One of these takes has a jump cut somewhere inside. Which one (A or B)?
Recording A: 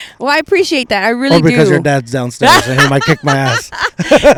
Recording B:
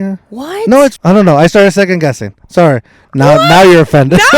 B